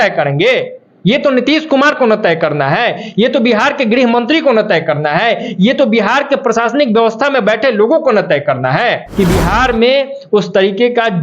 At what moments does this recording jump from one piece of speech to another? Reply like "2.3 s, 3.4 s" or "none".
9.0 s